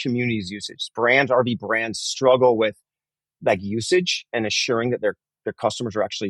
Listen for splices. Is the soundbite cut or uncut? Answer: uncut